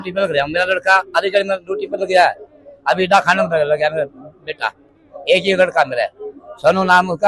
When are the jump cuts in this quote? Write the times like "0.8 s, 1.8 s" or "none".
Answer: none